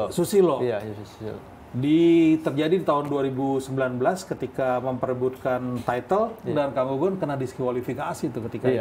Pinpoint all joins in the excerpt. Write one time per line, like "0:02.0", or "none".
0:06.5